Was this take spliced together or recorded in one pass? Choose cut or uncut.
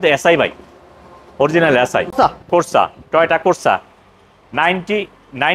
cut